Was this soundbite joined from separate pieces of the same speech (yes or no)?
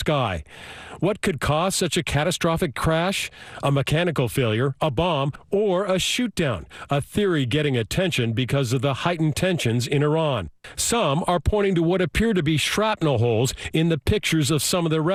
no